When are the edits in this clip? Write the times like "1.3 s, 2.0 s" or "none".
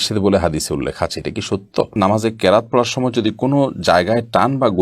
2.0 s